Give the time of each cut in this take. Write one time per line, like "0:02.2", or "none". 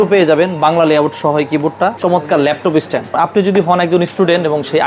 0:02.0
0:03.1

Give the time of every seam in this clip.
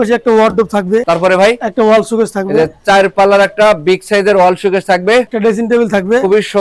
0:01.0
0:05.3

